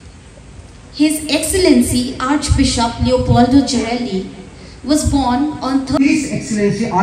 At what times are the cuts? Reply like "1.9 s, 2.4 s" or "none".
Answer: 6.0 s

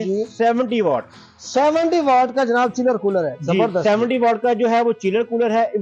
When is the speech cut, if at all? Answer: none

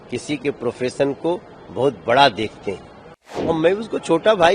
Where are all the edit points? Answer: 3.6 s

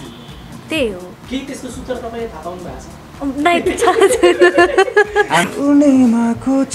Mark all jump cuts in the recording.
5.4 s

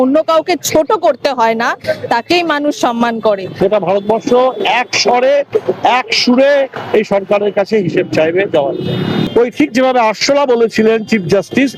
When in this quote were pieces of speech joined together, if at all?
3.5 s, 9.3 s

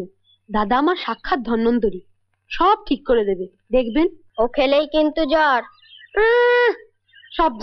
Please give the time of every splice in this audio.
4.2 s

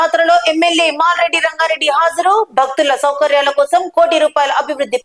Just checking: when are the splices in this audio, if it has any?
none

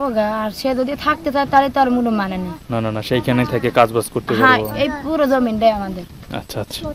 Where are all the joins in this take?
none

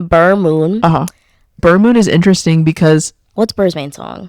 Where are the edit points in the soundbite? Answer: 1.6 s

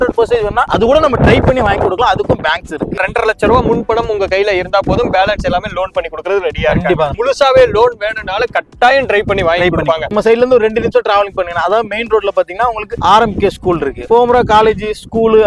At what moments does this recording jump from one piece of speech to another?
3.0 s, 7.1 s, 10.0 s, 14.0 s

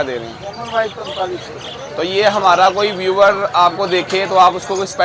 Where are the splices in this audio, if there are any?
none

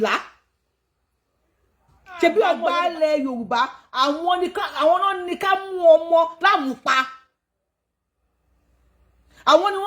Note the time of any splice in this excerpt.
2.6 s

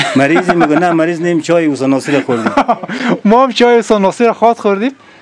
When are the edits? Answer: none

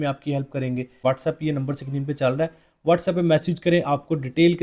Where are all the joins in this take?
0.9 s

